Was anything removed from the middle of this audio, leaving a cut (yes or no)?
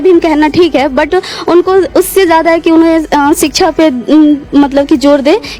no